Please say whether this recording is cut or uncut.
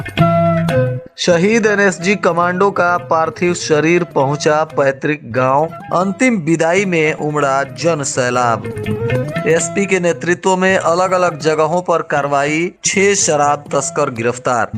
cut